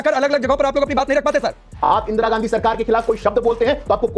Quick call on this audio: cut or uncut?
cut